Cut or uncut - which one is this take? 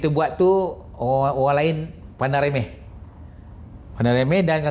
uncut